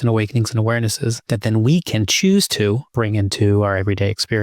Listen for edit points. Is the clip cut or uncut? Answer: cut